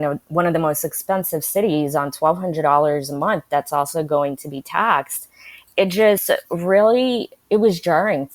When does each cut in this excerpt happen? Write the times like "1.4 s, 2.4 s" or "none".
none